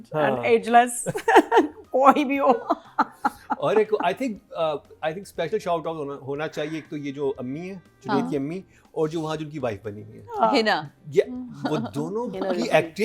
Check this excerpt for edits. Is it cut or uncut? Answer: uncut